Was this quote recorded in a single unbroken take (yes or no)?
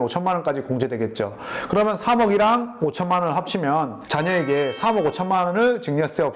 yes